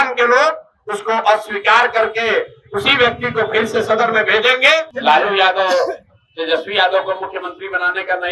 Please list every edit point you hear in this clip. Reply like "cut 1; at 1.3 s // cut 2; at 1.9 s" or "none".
cut 1; at 4.9 s